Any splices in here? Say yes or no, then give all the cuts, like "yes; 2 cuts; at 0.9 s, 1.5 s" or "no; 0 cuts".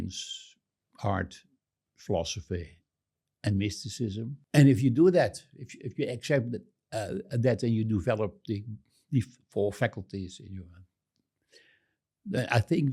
yes; 1 cut; at 4.4 s